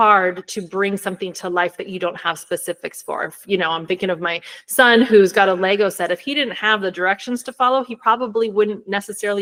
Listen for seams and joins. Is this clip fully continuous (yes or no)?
yes